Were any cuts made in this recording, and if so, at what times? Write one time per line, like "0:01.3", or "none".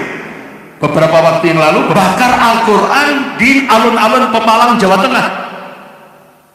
none